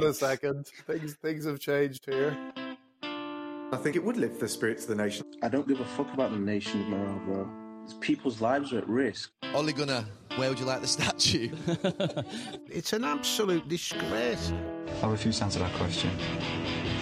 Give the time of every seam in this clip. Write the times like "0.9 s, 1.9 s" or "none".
0.8 s, 2.5 s